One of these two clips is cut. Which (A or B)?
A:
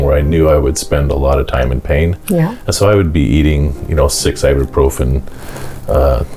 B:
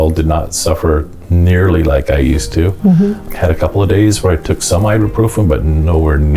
B